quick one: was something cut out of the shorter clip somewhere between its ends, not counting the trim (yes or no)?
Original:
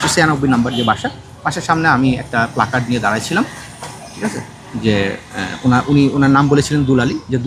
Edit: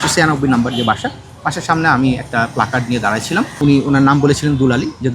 yes